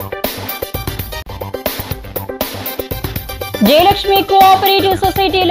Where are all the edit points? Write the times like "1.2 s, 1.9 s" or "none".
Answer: none